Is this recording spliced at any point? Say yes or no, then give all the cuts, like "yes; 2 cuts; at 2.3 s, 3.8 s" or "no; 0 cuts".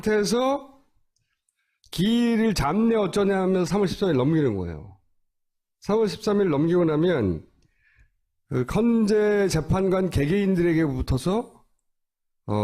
yes; 1 cut; at 6.2 s